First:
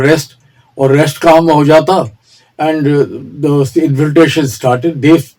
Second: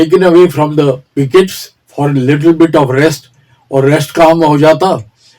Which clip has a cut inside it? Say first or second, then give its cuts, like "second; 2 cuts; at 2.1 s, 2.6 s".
second; 1 cut; at 1.1 s